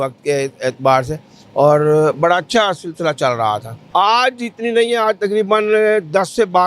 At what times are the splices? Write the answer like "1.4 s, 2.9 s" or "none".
3.8 s

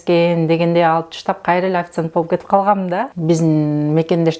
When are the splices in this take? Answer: 3.1 s

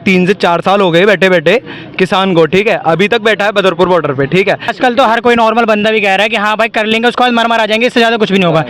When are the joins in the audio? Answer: 4.7 s

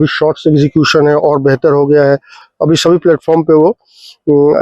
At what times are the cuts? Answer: 2.5 s

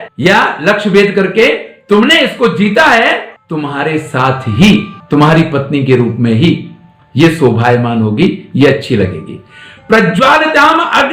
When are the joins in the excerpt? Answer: none

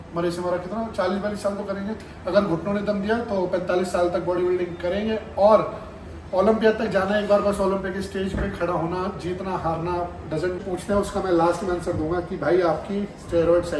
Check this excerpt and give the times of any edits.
10.6 s

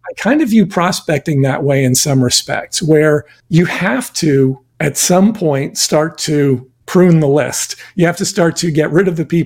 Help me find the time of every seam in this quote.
3.4 s, 4.7 s, 6.7 s

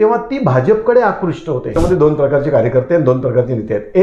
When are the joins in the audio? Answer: 1.7 s

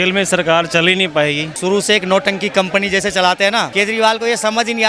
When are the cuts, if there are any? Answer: 1.5 s, 3.7 s

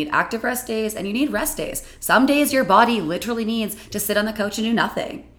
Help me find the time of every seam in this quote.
none

